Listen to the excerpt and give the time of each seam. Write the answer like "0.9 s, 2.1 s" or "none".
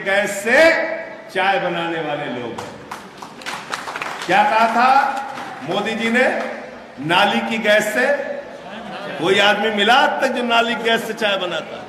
none